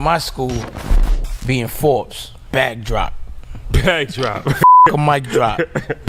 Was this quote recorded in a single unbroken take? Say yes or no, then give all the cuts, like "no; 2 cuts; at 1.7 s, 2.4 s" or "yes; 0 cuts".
yes; 0 cuts